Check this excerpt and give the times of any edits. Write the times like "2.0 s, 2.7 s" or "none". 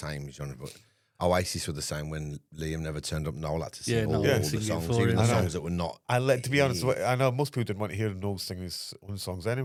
none

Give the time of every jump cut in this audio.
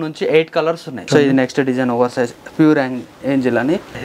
1.0 s

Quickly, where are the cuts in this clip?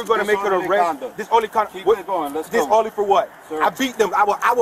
2.9 s

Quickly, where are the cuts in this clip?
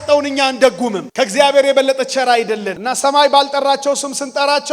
1.0 s, 2.8 s

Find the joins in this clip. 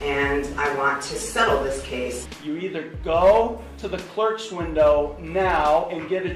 2.3 s

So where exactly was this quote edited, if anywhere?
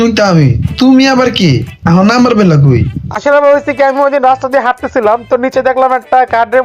3.0 s

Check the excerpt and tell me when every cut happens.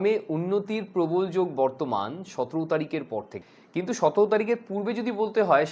3.4 s

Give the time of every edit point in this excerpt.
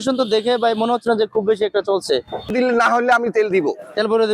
2.5 s

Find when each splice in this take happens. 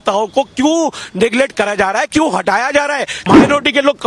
3.2 s

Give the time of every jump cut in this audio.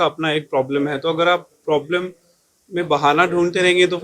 none

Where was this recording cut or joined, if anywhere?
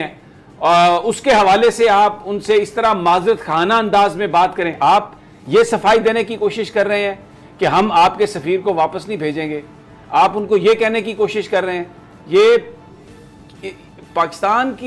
4.8 s

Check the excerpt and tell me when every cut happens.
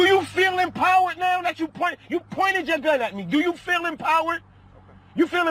none

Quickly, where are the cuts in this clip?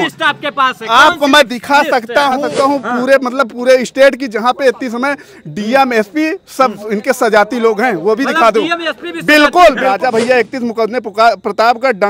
2.4 s, 9.9 s

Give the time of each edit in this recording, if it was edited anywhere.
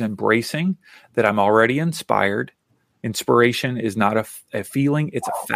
4.4 s

